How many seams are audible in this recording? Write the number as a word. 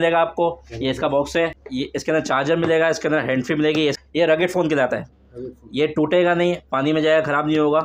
two